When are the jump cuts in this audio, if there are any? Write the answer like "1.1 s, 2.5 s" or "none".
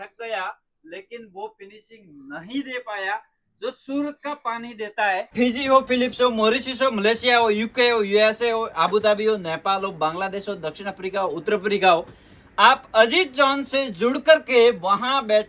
5.3 s

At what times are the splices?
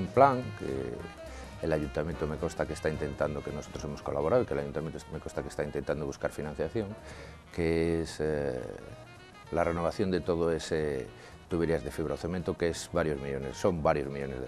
none

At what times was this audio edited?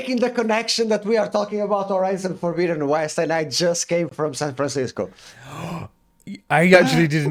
none

